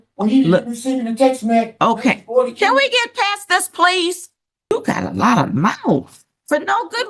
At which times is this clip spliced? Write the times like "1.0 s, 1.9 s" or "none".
4.7 s